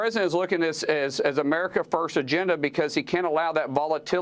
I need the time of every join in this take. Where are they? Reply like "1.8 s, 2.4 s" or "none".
none